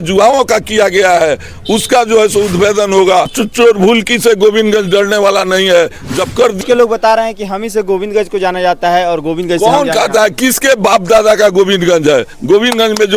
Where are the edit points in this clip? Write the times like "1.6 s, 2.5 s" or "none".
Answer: 3.3 s, 6.6 s